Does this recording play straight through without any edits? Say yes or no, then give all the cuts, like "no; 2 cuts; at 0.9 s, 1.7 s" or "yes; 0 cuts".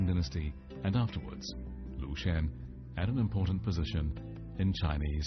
yes; 0 cuts